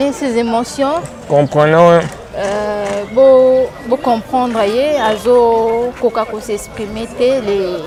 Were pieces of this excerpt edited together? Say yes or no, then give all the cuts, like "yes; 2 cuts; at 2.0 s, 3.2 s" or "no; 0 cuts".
no; 0 cuts